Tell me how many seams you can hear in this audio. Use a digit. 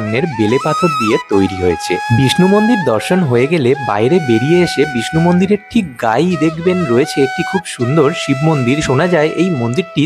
2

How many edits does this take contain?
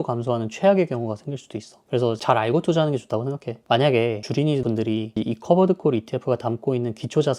0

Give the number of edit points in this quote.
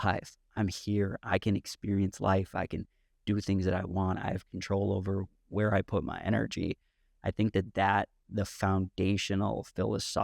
0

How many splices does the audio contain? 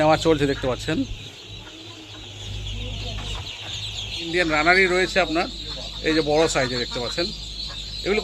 1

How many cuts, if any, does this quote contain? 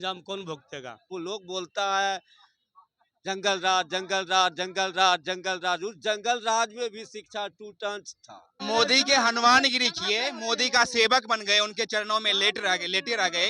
2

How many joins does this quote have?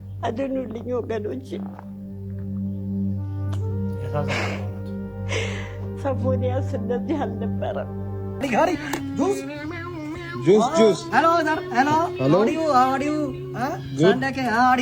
1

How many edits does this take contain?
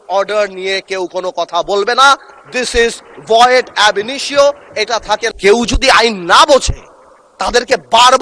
1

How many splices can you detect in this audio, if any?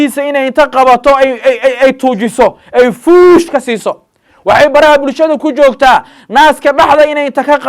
0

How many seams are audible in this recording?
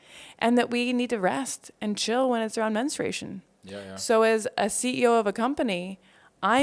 0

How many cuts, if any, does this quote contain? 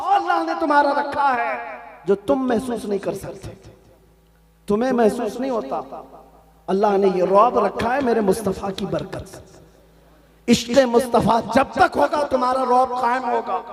0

